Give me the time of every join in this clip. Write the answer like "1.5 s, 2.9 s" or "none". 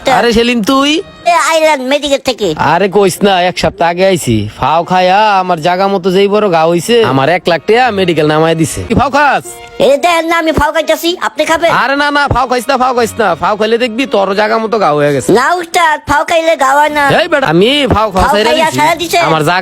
1.3 s, 8.9 s, 17.4 s